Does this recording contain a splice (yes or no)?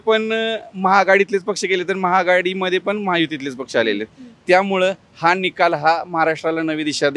no